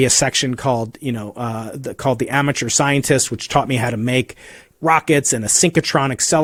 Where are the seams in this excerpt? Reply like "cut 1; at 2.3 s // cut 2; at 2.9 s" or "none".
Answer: none